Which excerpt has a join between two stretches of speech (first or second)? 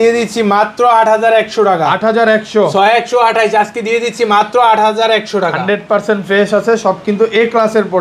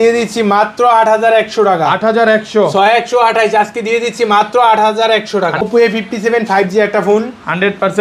second